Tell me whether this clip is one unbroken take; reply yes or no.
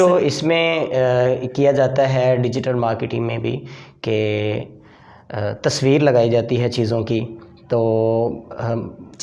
yes